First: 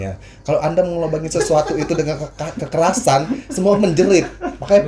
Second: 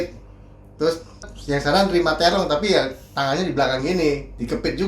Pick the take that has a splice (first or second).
second